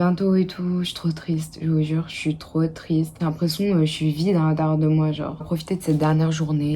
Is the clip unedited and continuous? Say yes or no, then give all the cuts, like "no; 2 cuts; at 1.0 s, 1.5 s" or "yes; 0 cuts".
no; 2 cuts; at 3.1 s, 5.4 s